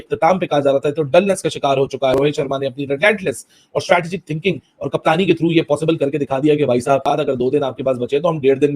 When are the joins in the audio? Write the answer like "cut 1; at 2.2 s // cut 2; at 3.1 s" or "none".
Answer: cut 1; at 2.1 s // cut 2; at 7.0 s